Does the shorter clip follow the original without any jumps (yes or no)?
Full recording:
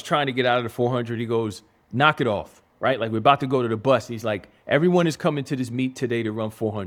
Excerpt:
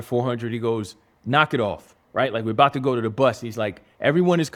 yes